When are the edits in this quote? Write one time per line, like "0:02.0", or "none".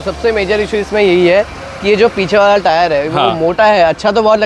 none